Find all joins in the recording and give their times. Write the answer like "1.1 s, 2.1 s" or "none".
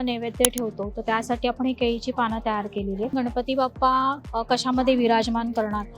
3.1 s